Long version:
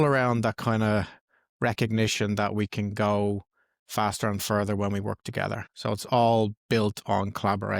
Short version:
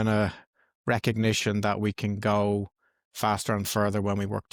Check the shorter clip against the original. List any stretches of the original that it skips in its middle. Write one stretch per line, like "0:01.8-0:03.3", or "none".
none

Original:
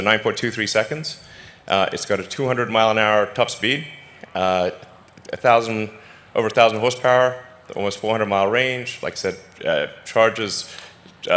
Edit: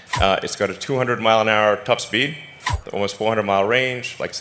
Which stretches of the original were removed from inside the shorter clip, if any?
0:04.2-0:07.5

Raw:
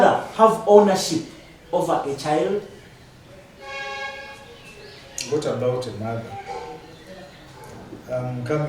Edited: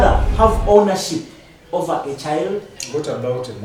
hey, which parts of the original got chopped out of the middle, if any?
0:02.8-0:05.1

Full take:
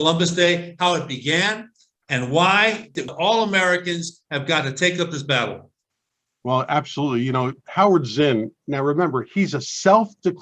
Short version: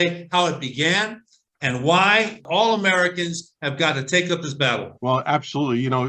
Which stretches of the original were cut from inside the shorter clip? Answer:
0:02.9-0:03.1
0:05.6-0:06.3

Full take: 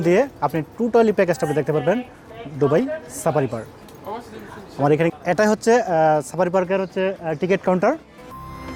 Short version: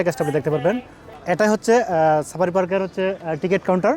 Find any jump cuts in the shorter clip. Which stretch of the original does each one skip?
0:02.4-0:05.2

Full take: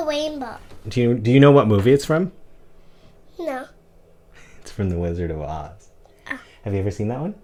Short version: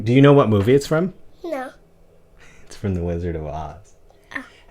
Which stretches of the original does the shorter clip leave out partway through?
0:02.4-0:03.2

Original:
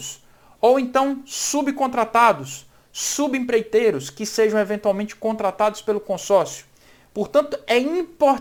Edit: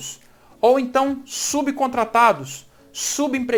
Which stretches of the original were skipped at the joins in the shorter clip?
none

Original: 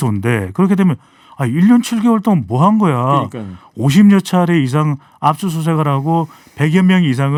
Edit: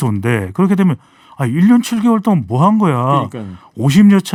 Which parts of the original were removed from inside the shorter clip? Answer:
none

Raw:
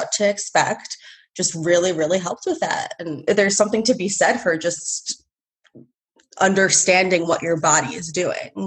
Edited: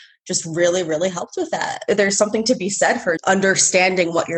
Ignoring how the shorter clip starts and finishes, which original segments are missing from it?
0:02.8-0:03.1
0:04.6-0:06.3

